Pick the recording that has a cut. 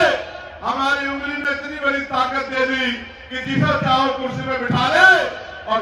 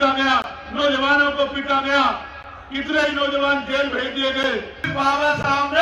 second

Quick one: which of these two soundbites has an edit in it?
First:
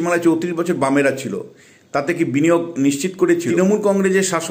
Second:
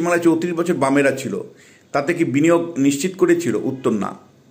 first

